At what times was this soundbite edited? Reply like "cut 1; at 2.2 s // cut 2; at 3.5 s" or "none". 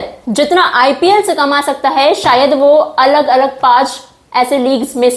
none